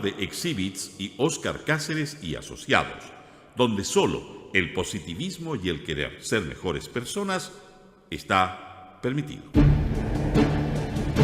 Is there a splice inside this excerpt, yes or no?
yes